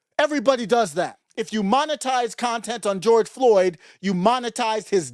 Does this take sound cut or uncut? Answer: cut